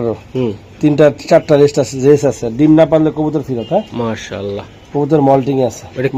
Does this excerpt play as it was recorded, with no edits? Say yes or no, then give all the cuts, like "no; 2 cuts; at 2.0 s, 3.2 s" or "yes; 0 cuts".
yes; 0 cuts